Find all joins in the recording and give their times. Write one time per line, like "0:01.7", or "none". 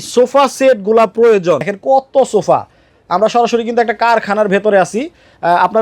0:01.7

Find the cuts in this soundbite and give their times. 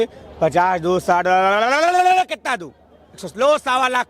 none

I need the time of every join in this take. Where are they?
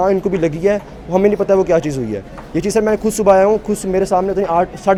none

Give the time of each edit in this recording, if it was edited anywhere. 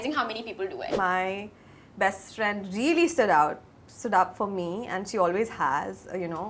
0:01.0

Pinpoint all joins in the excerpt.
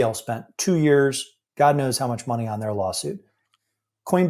none

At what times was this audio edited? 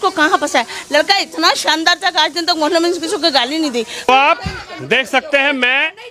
0:04.1

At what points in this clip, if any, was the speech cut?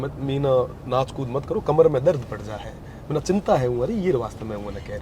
none

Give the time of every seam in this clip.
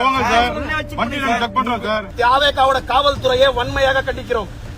0:02.1

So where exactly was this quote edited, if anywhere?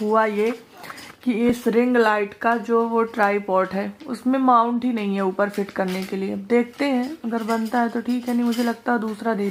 none

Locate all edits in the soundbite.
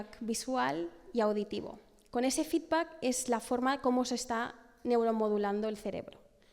none

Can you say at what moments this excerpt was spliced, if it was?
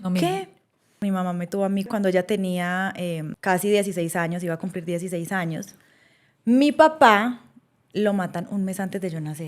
0:01.0
0:01.9
0:03.3

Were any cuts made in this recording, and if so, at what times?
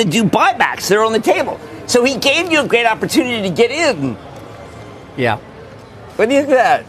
none

